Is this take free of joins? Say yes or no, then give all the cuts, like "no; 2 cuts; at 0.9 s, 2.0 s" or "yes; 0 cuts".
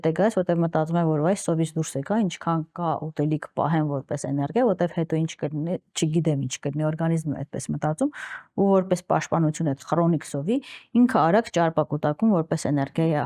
yes; 0 cuts